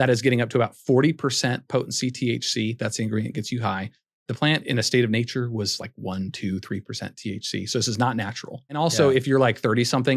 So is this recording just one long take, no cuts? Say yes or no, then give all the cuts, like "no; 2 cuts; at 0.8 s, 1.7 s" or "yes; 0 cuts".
no; 1 cut; at 8.8 s